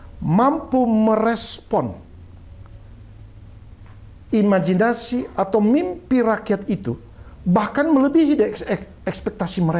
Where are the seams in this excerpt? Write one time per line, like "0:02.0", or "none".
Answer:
none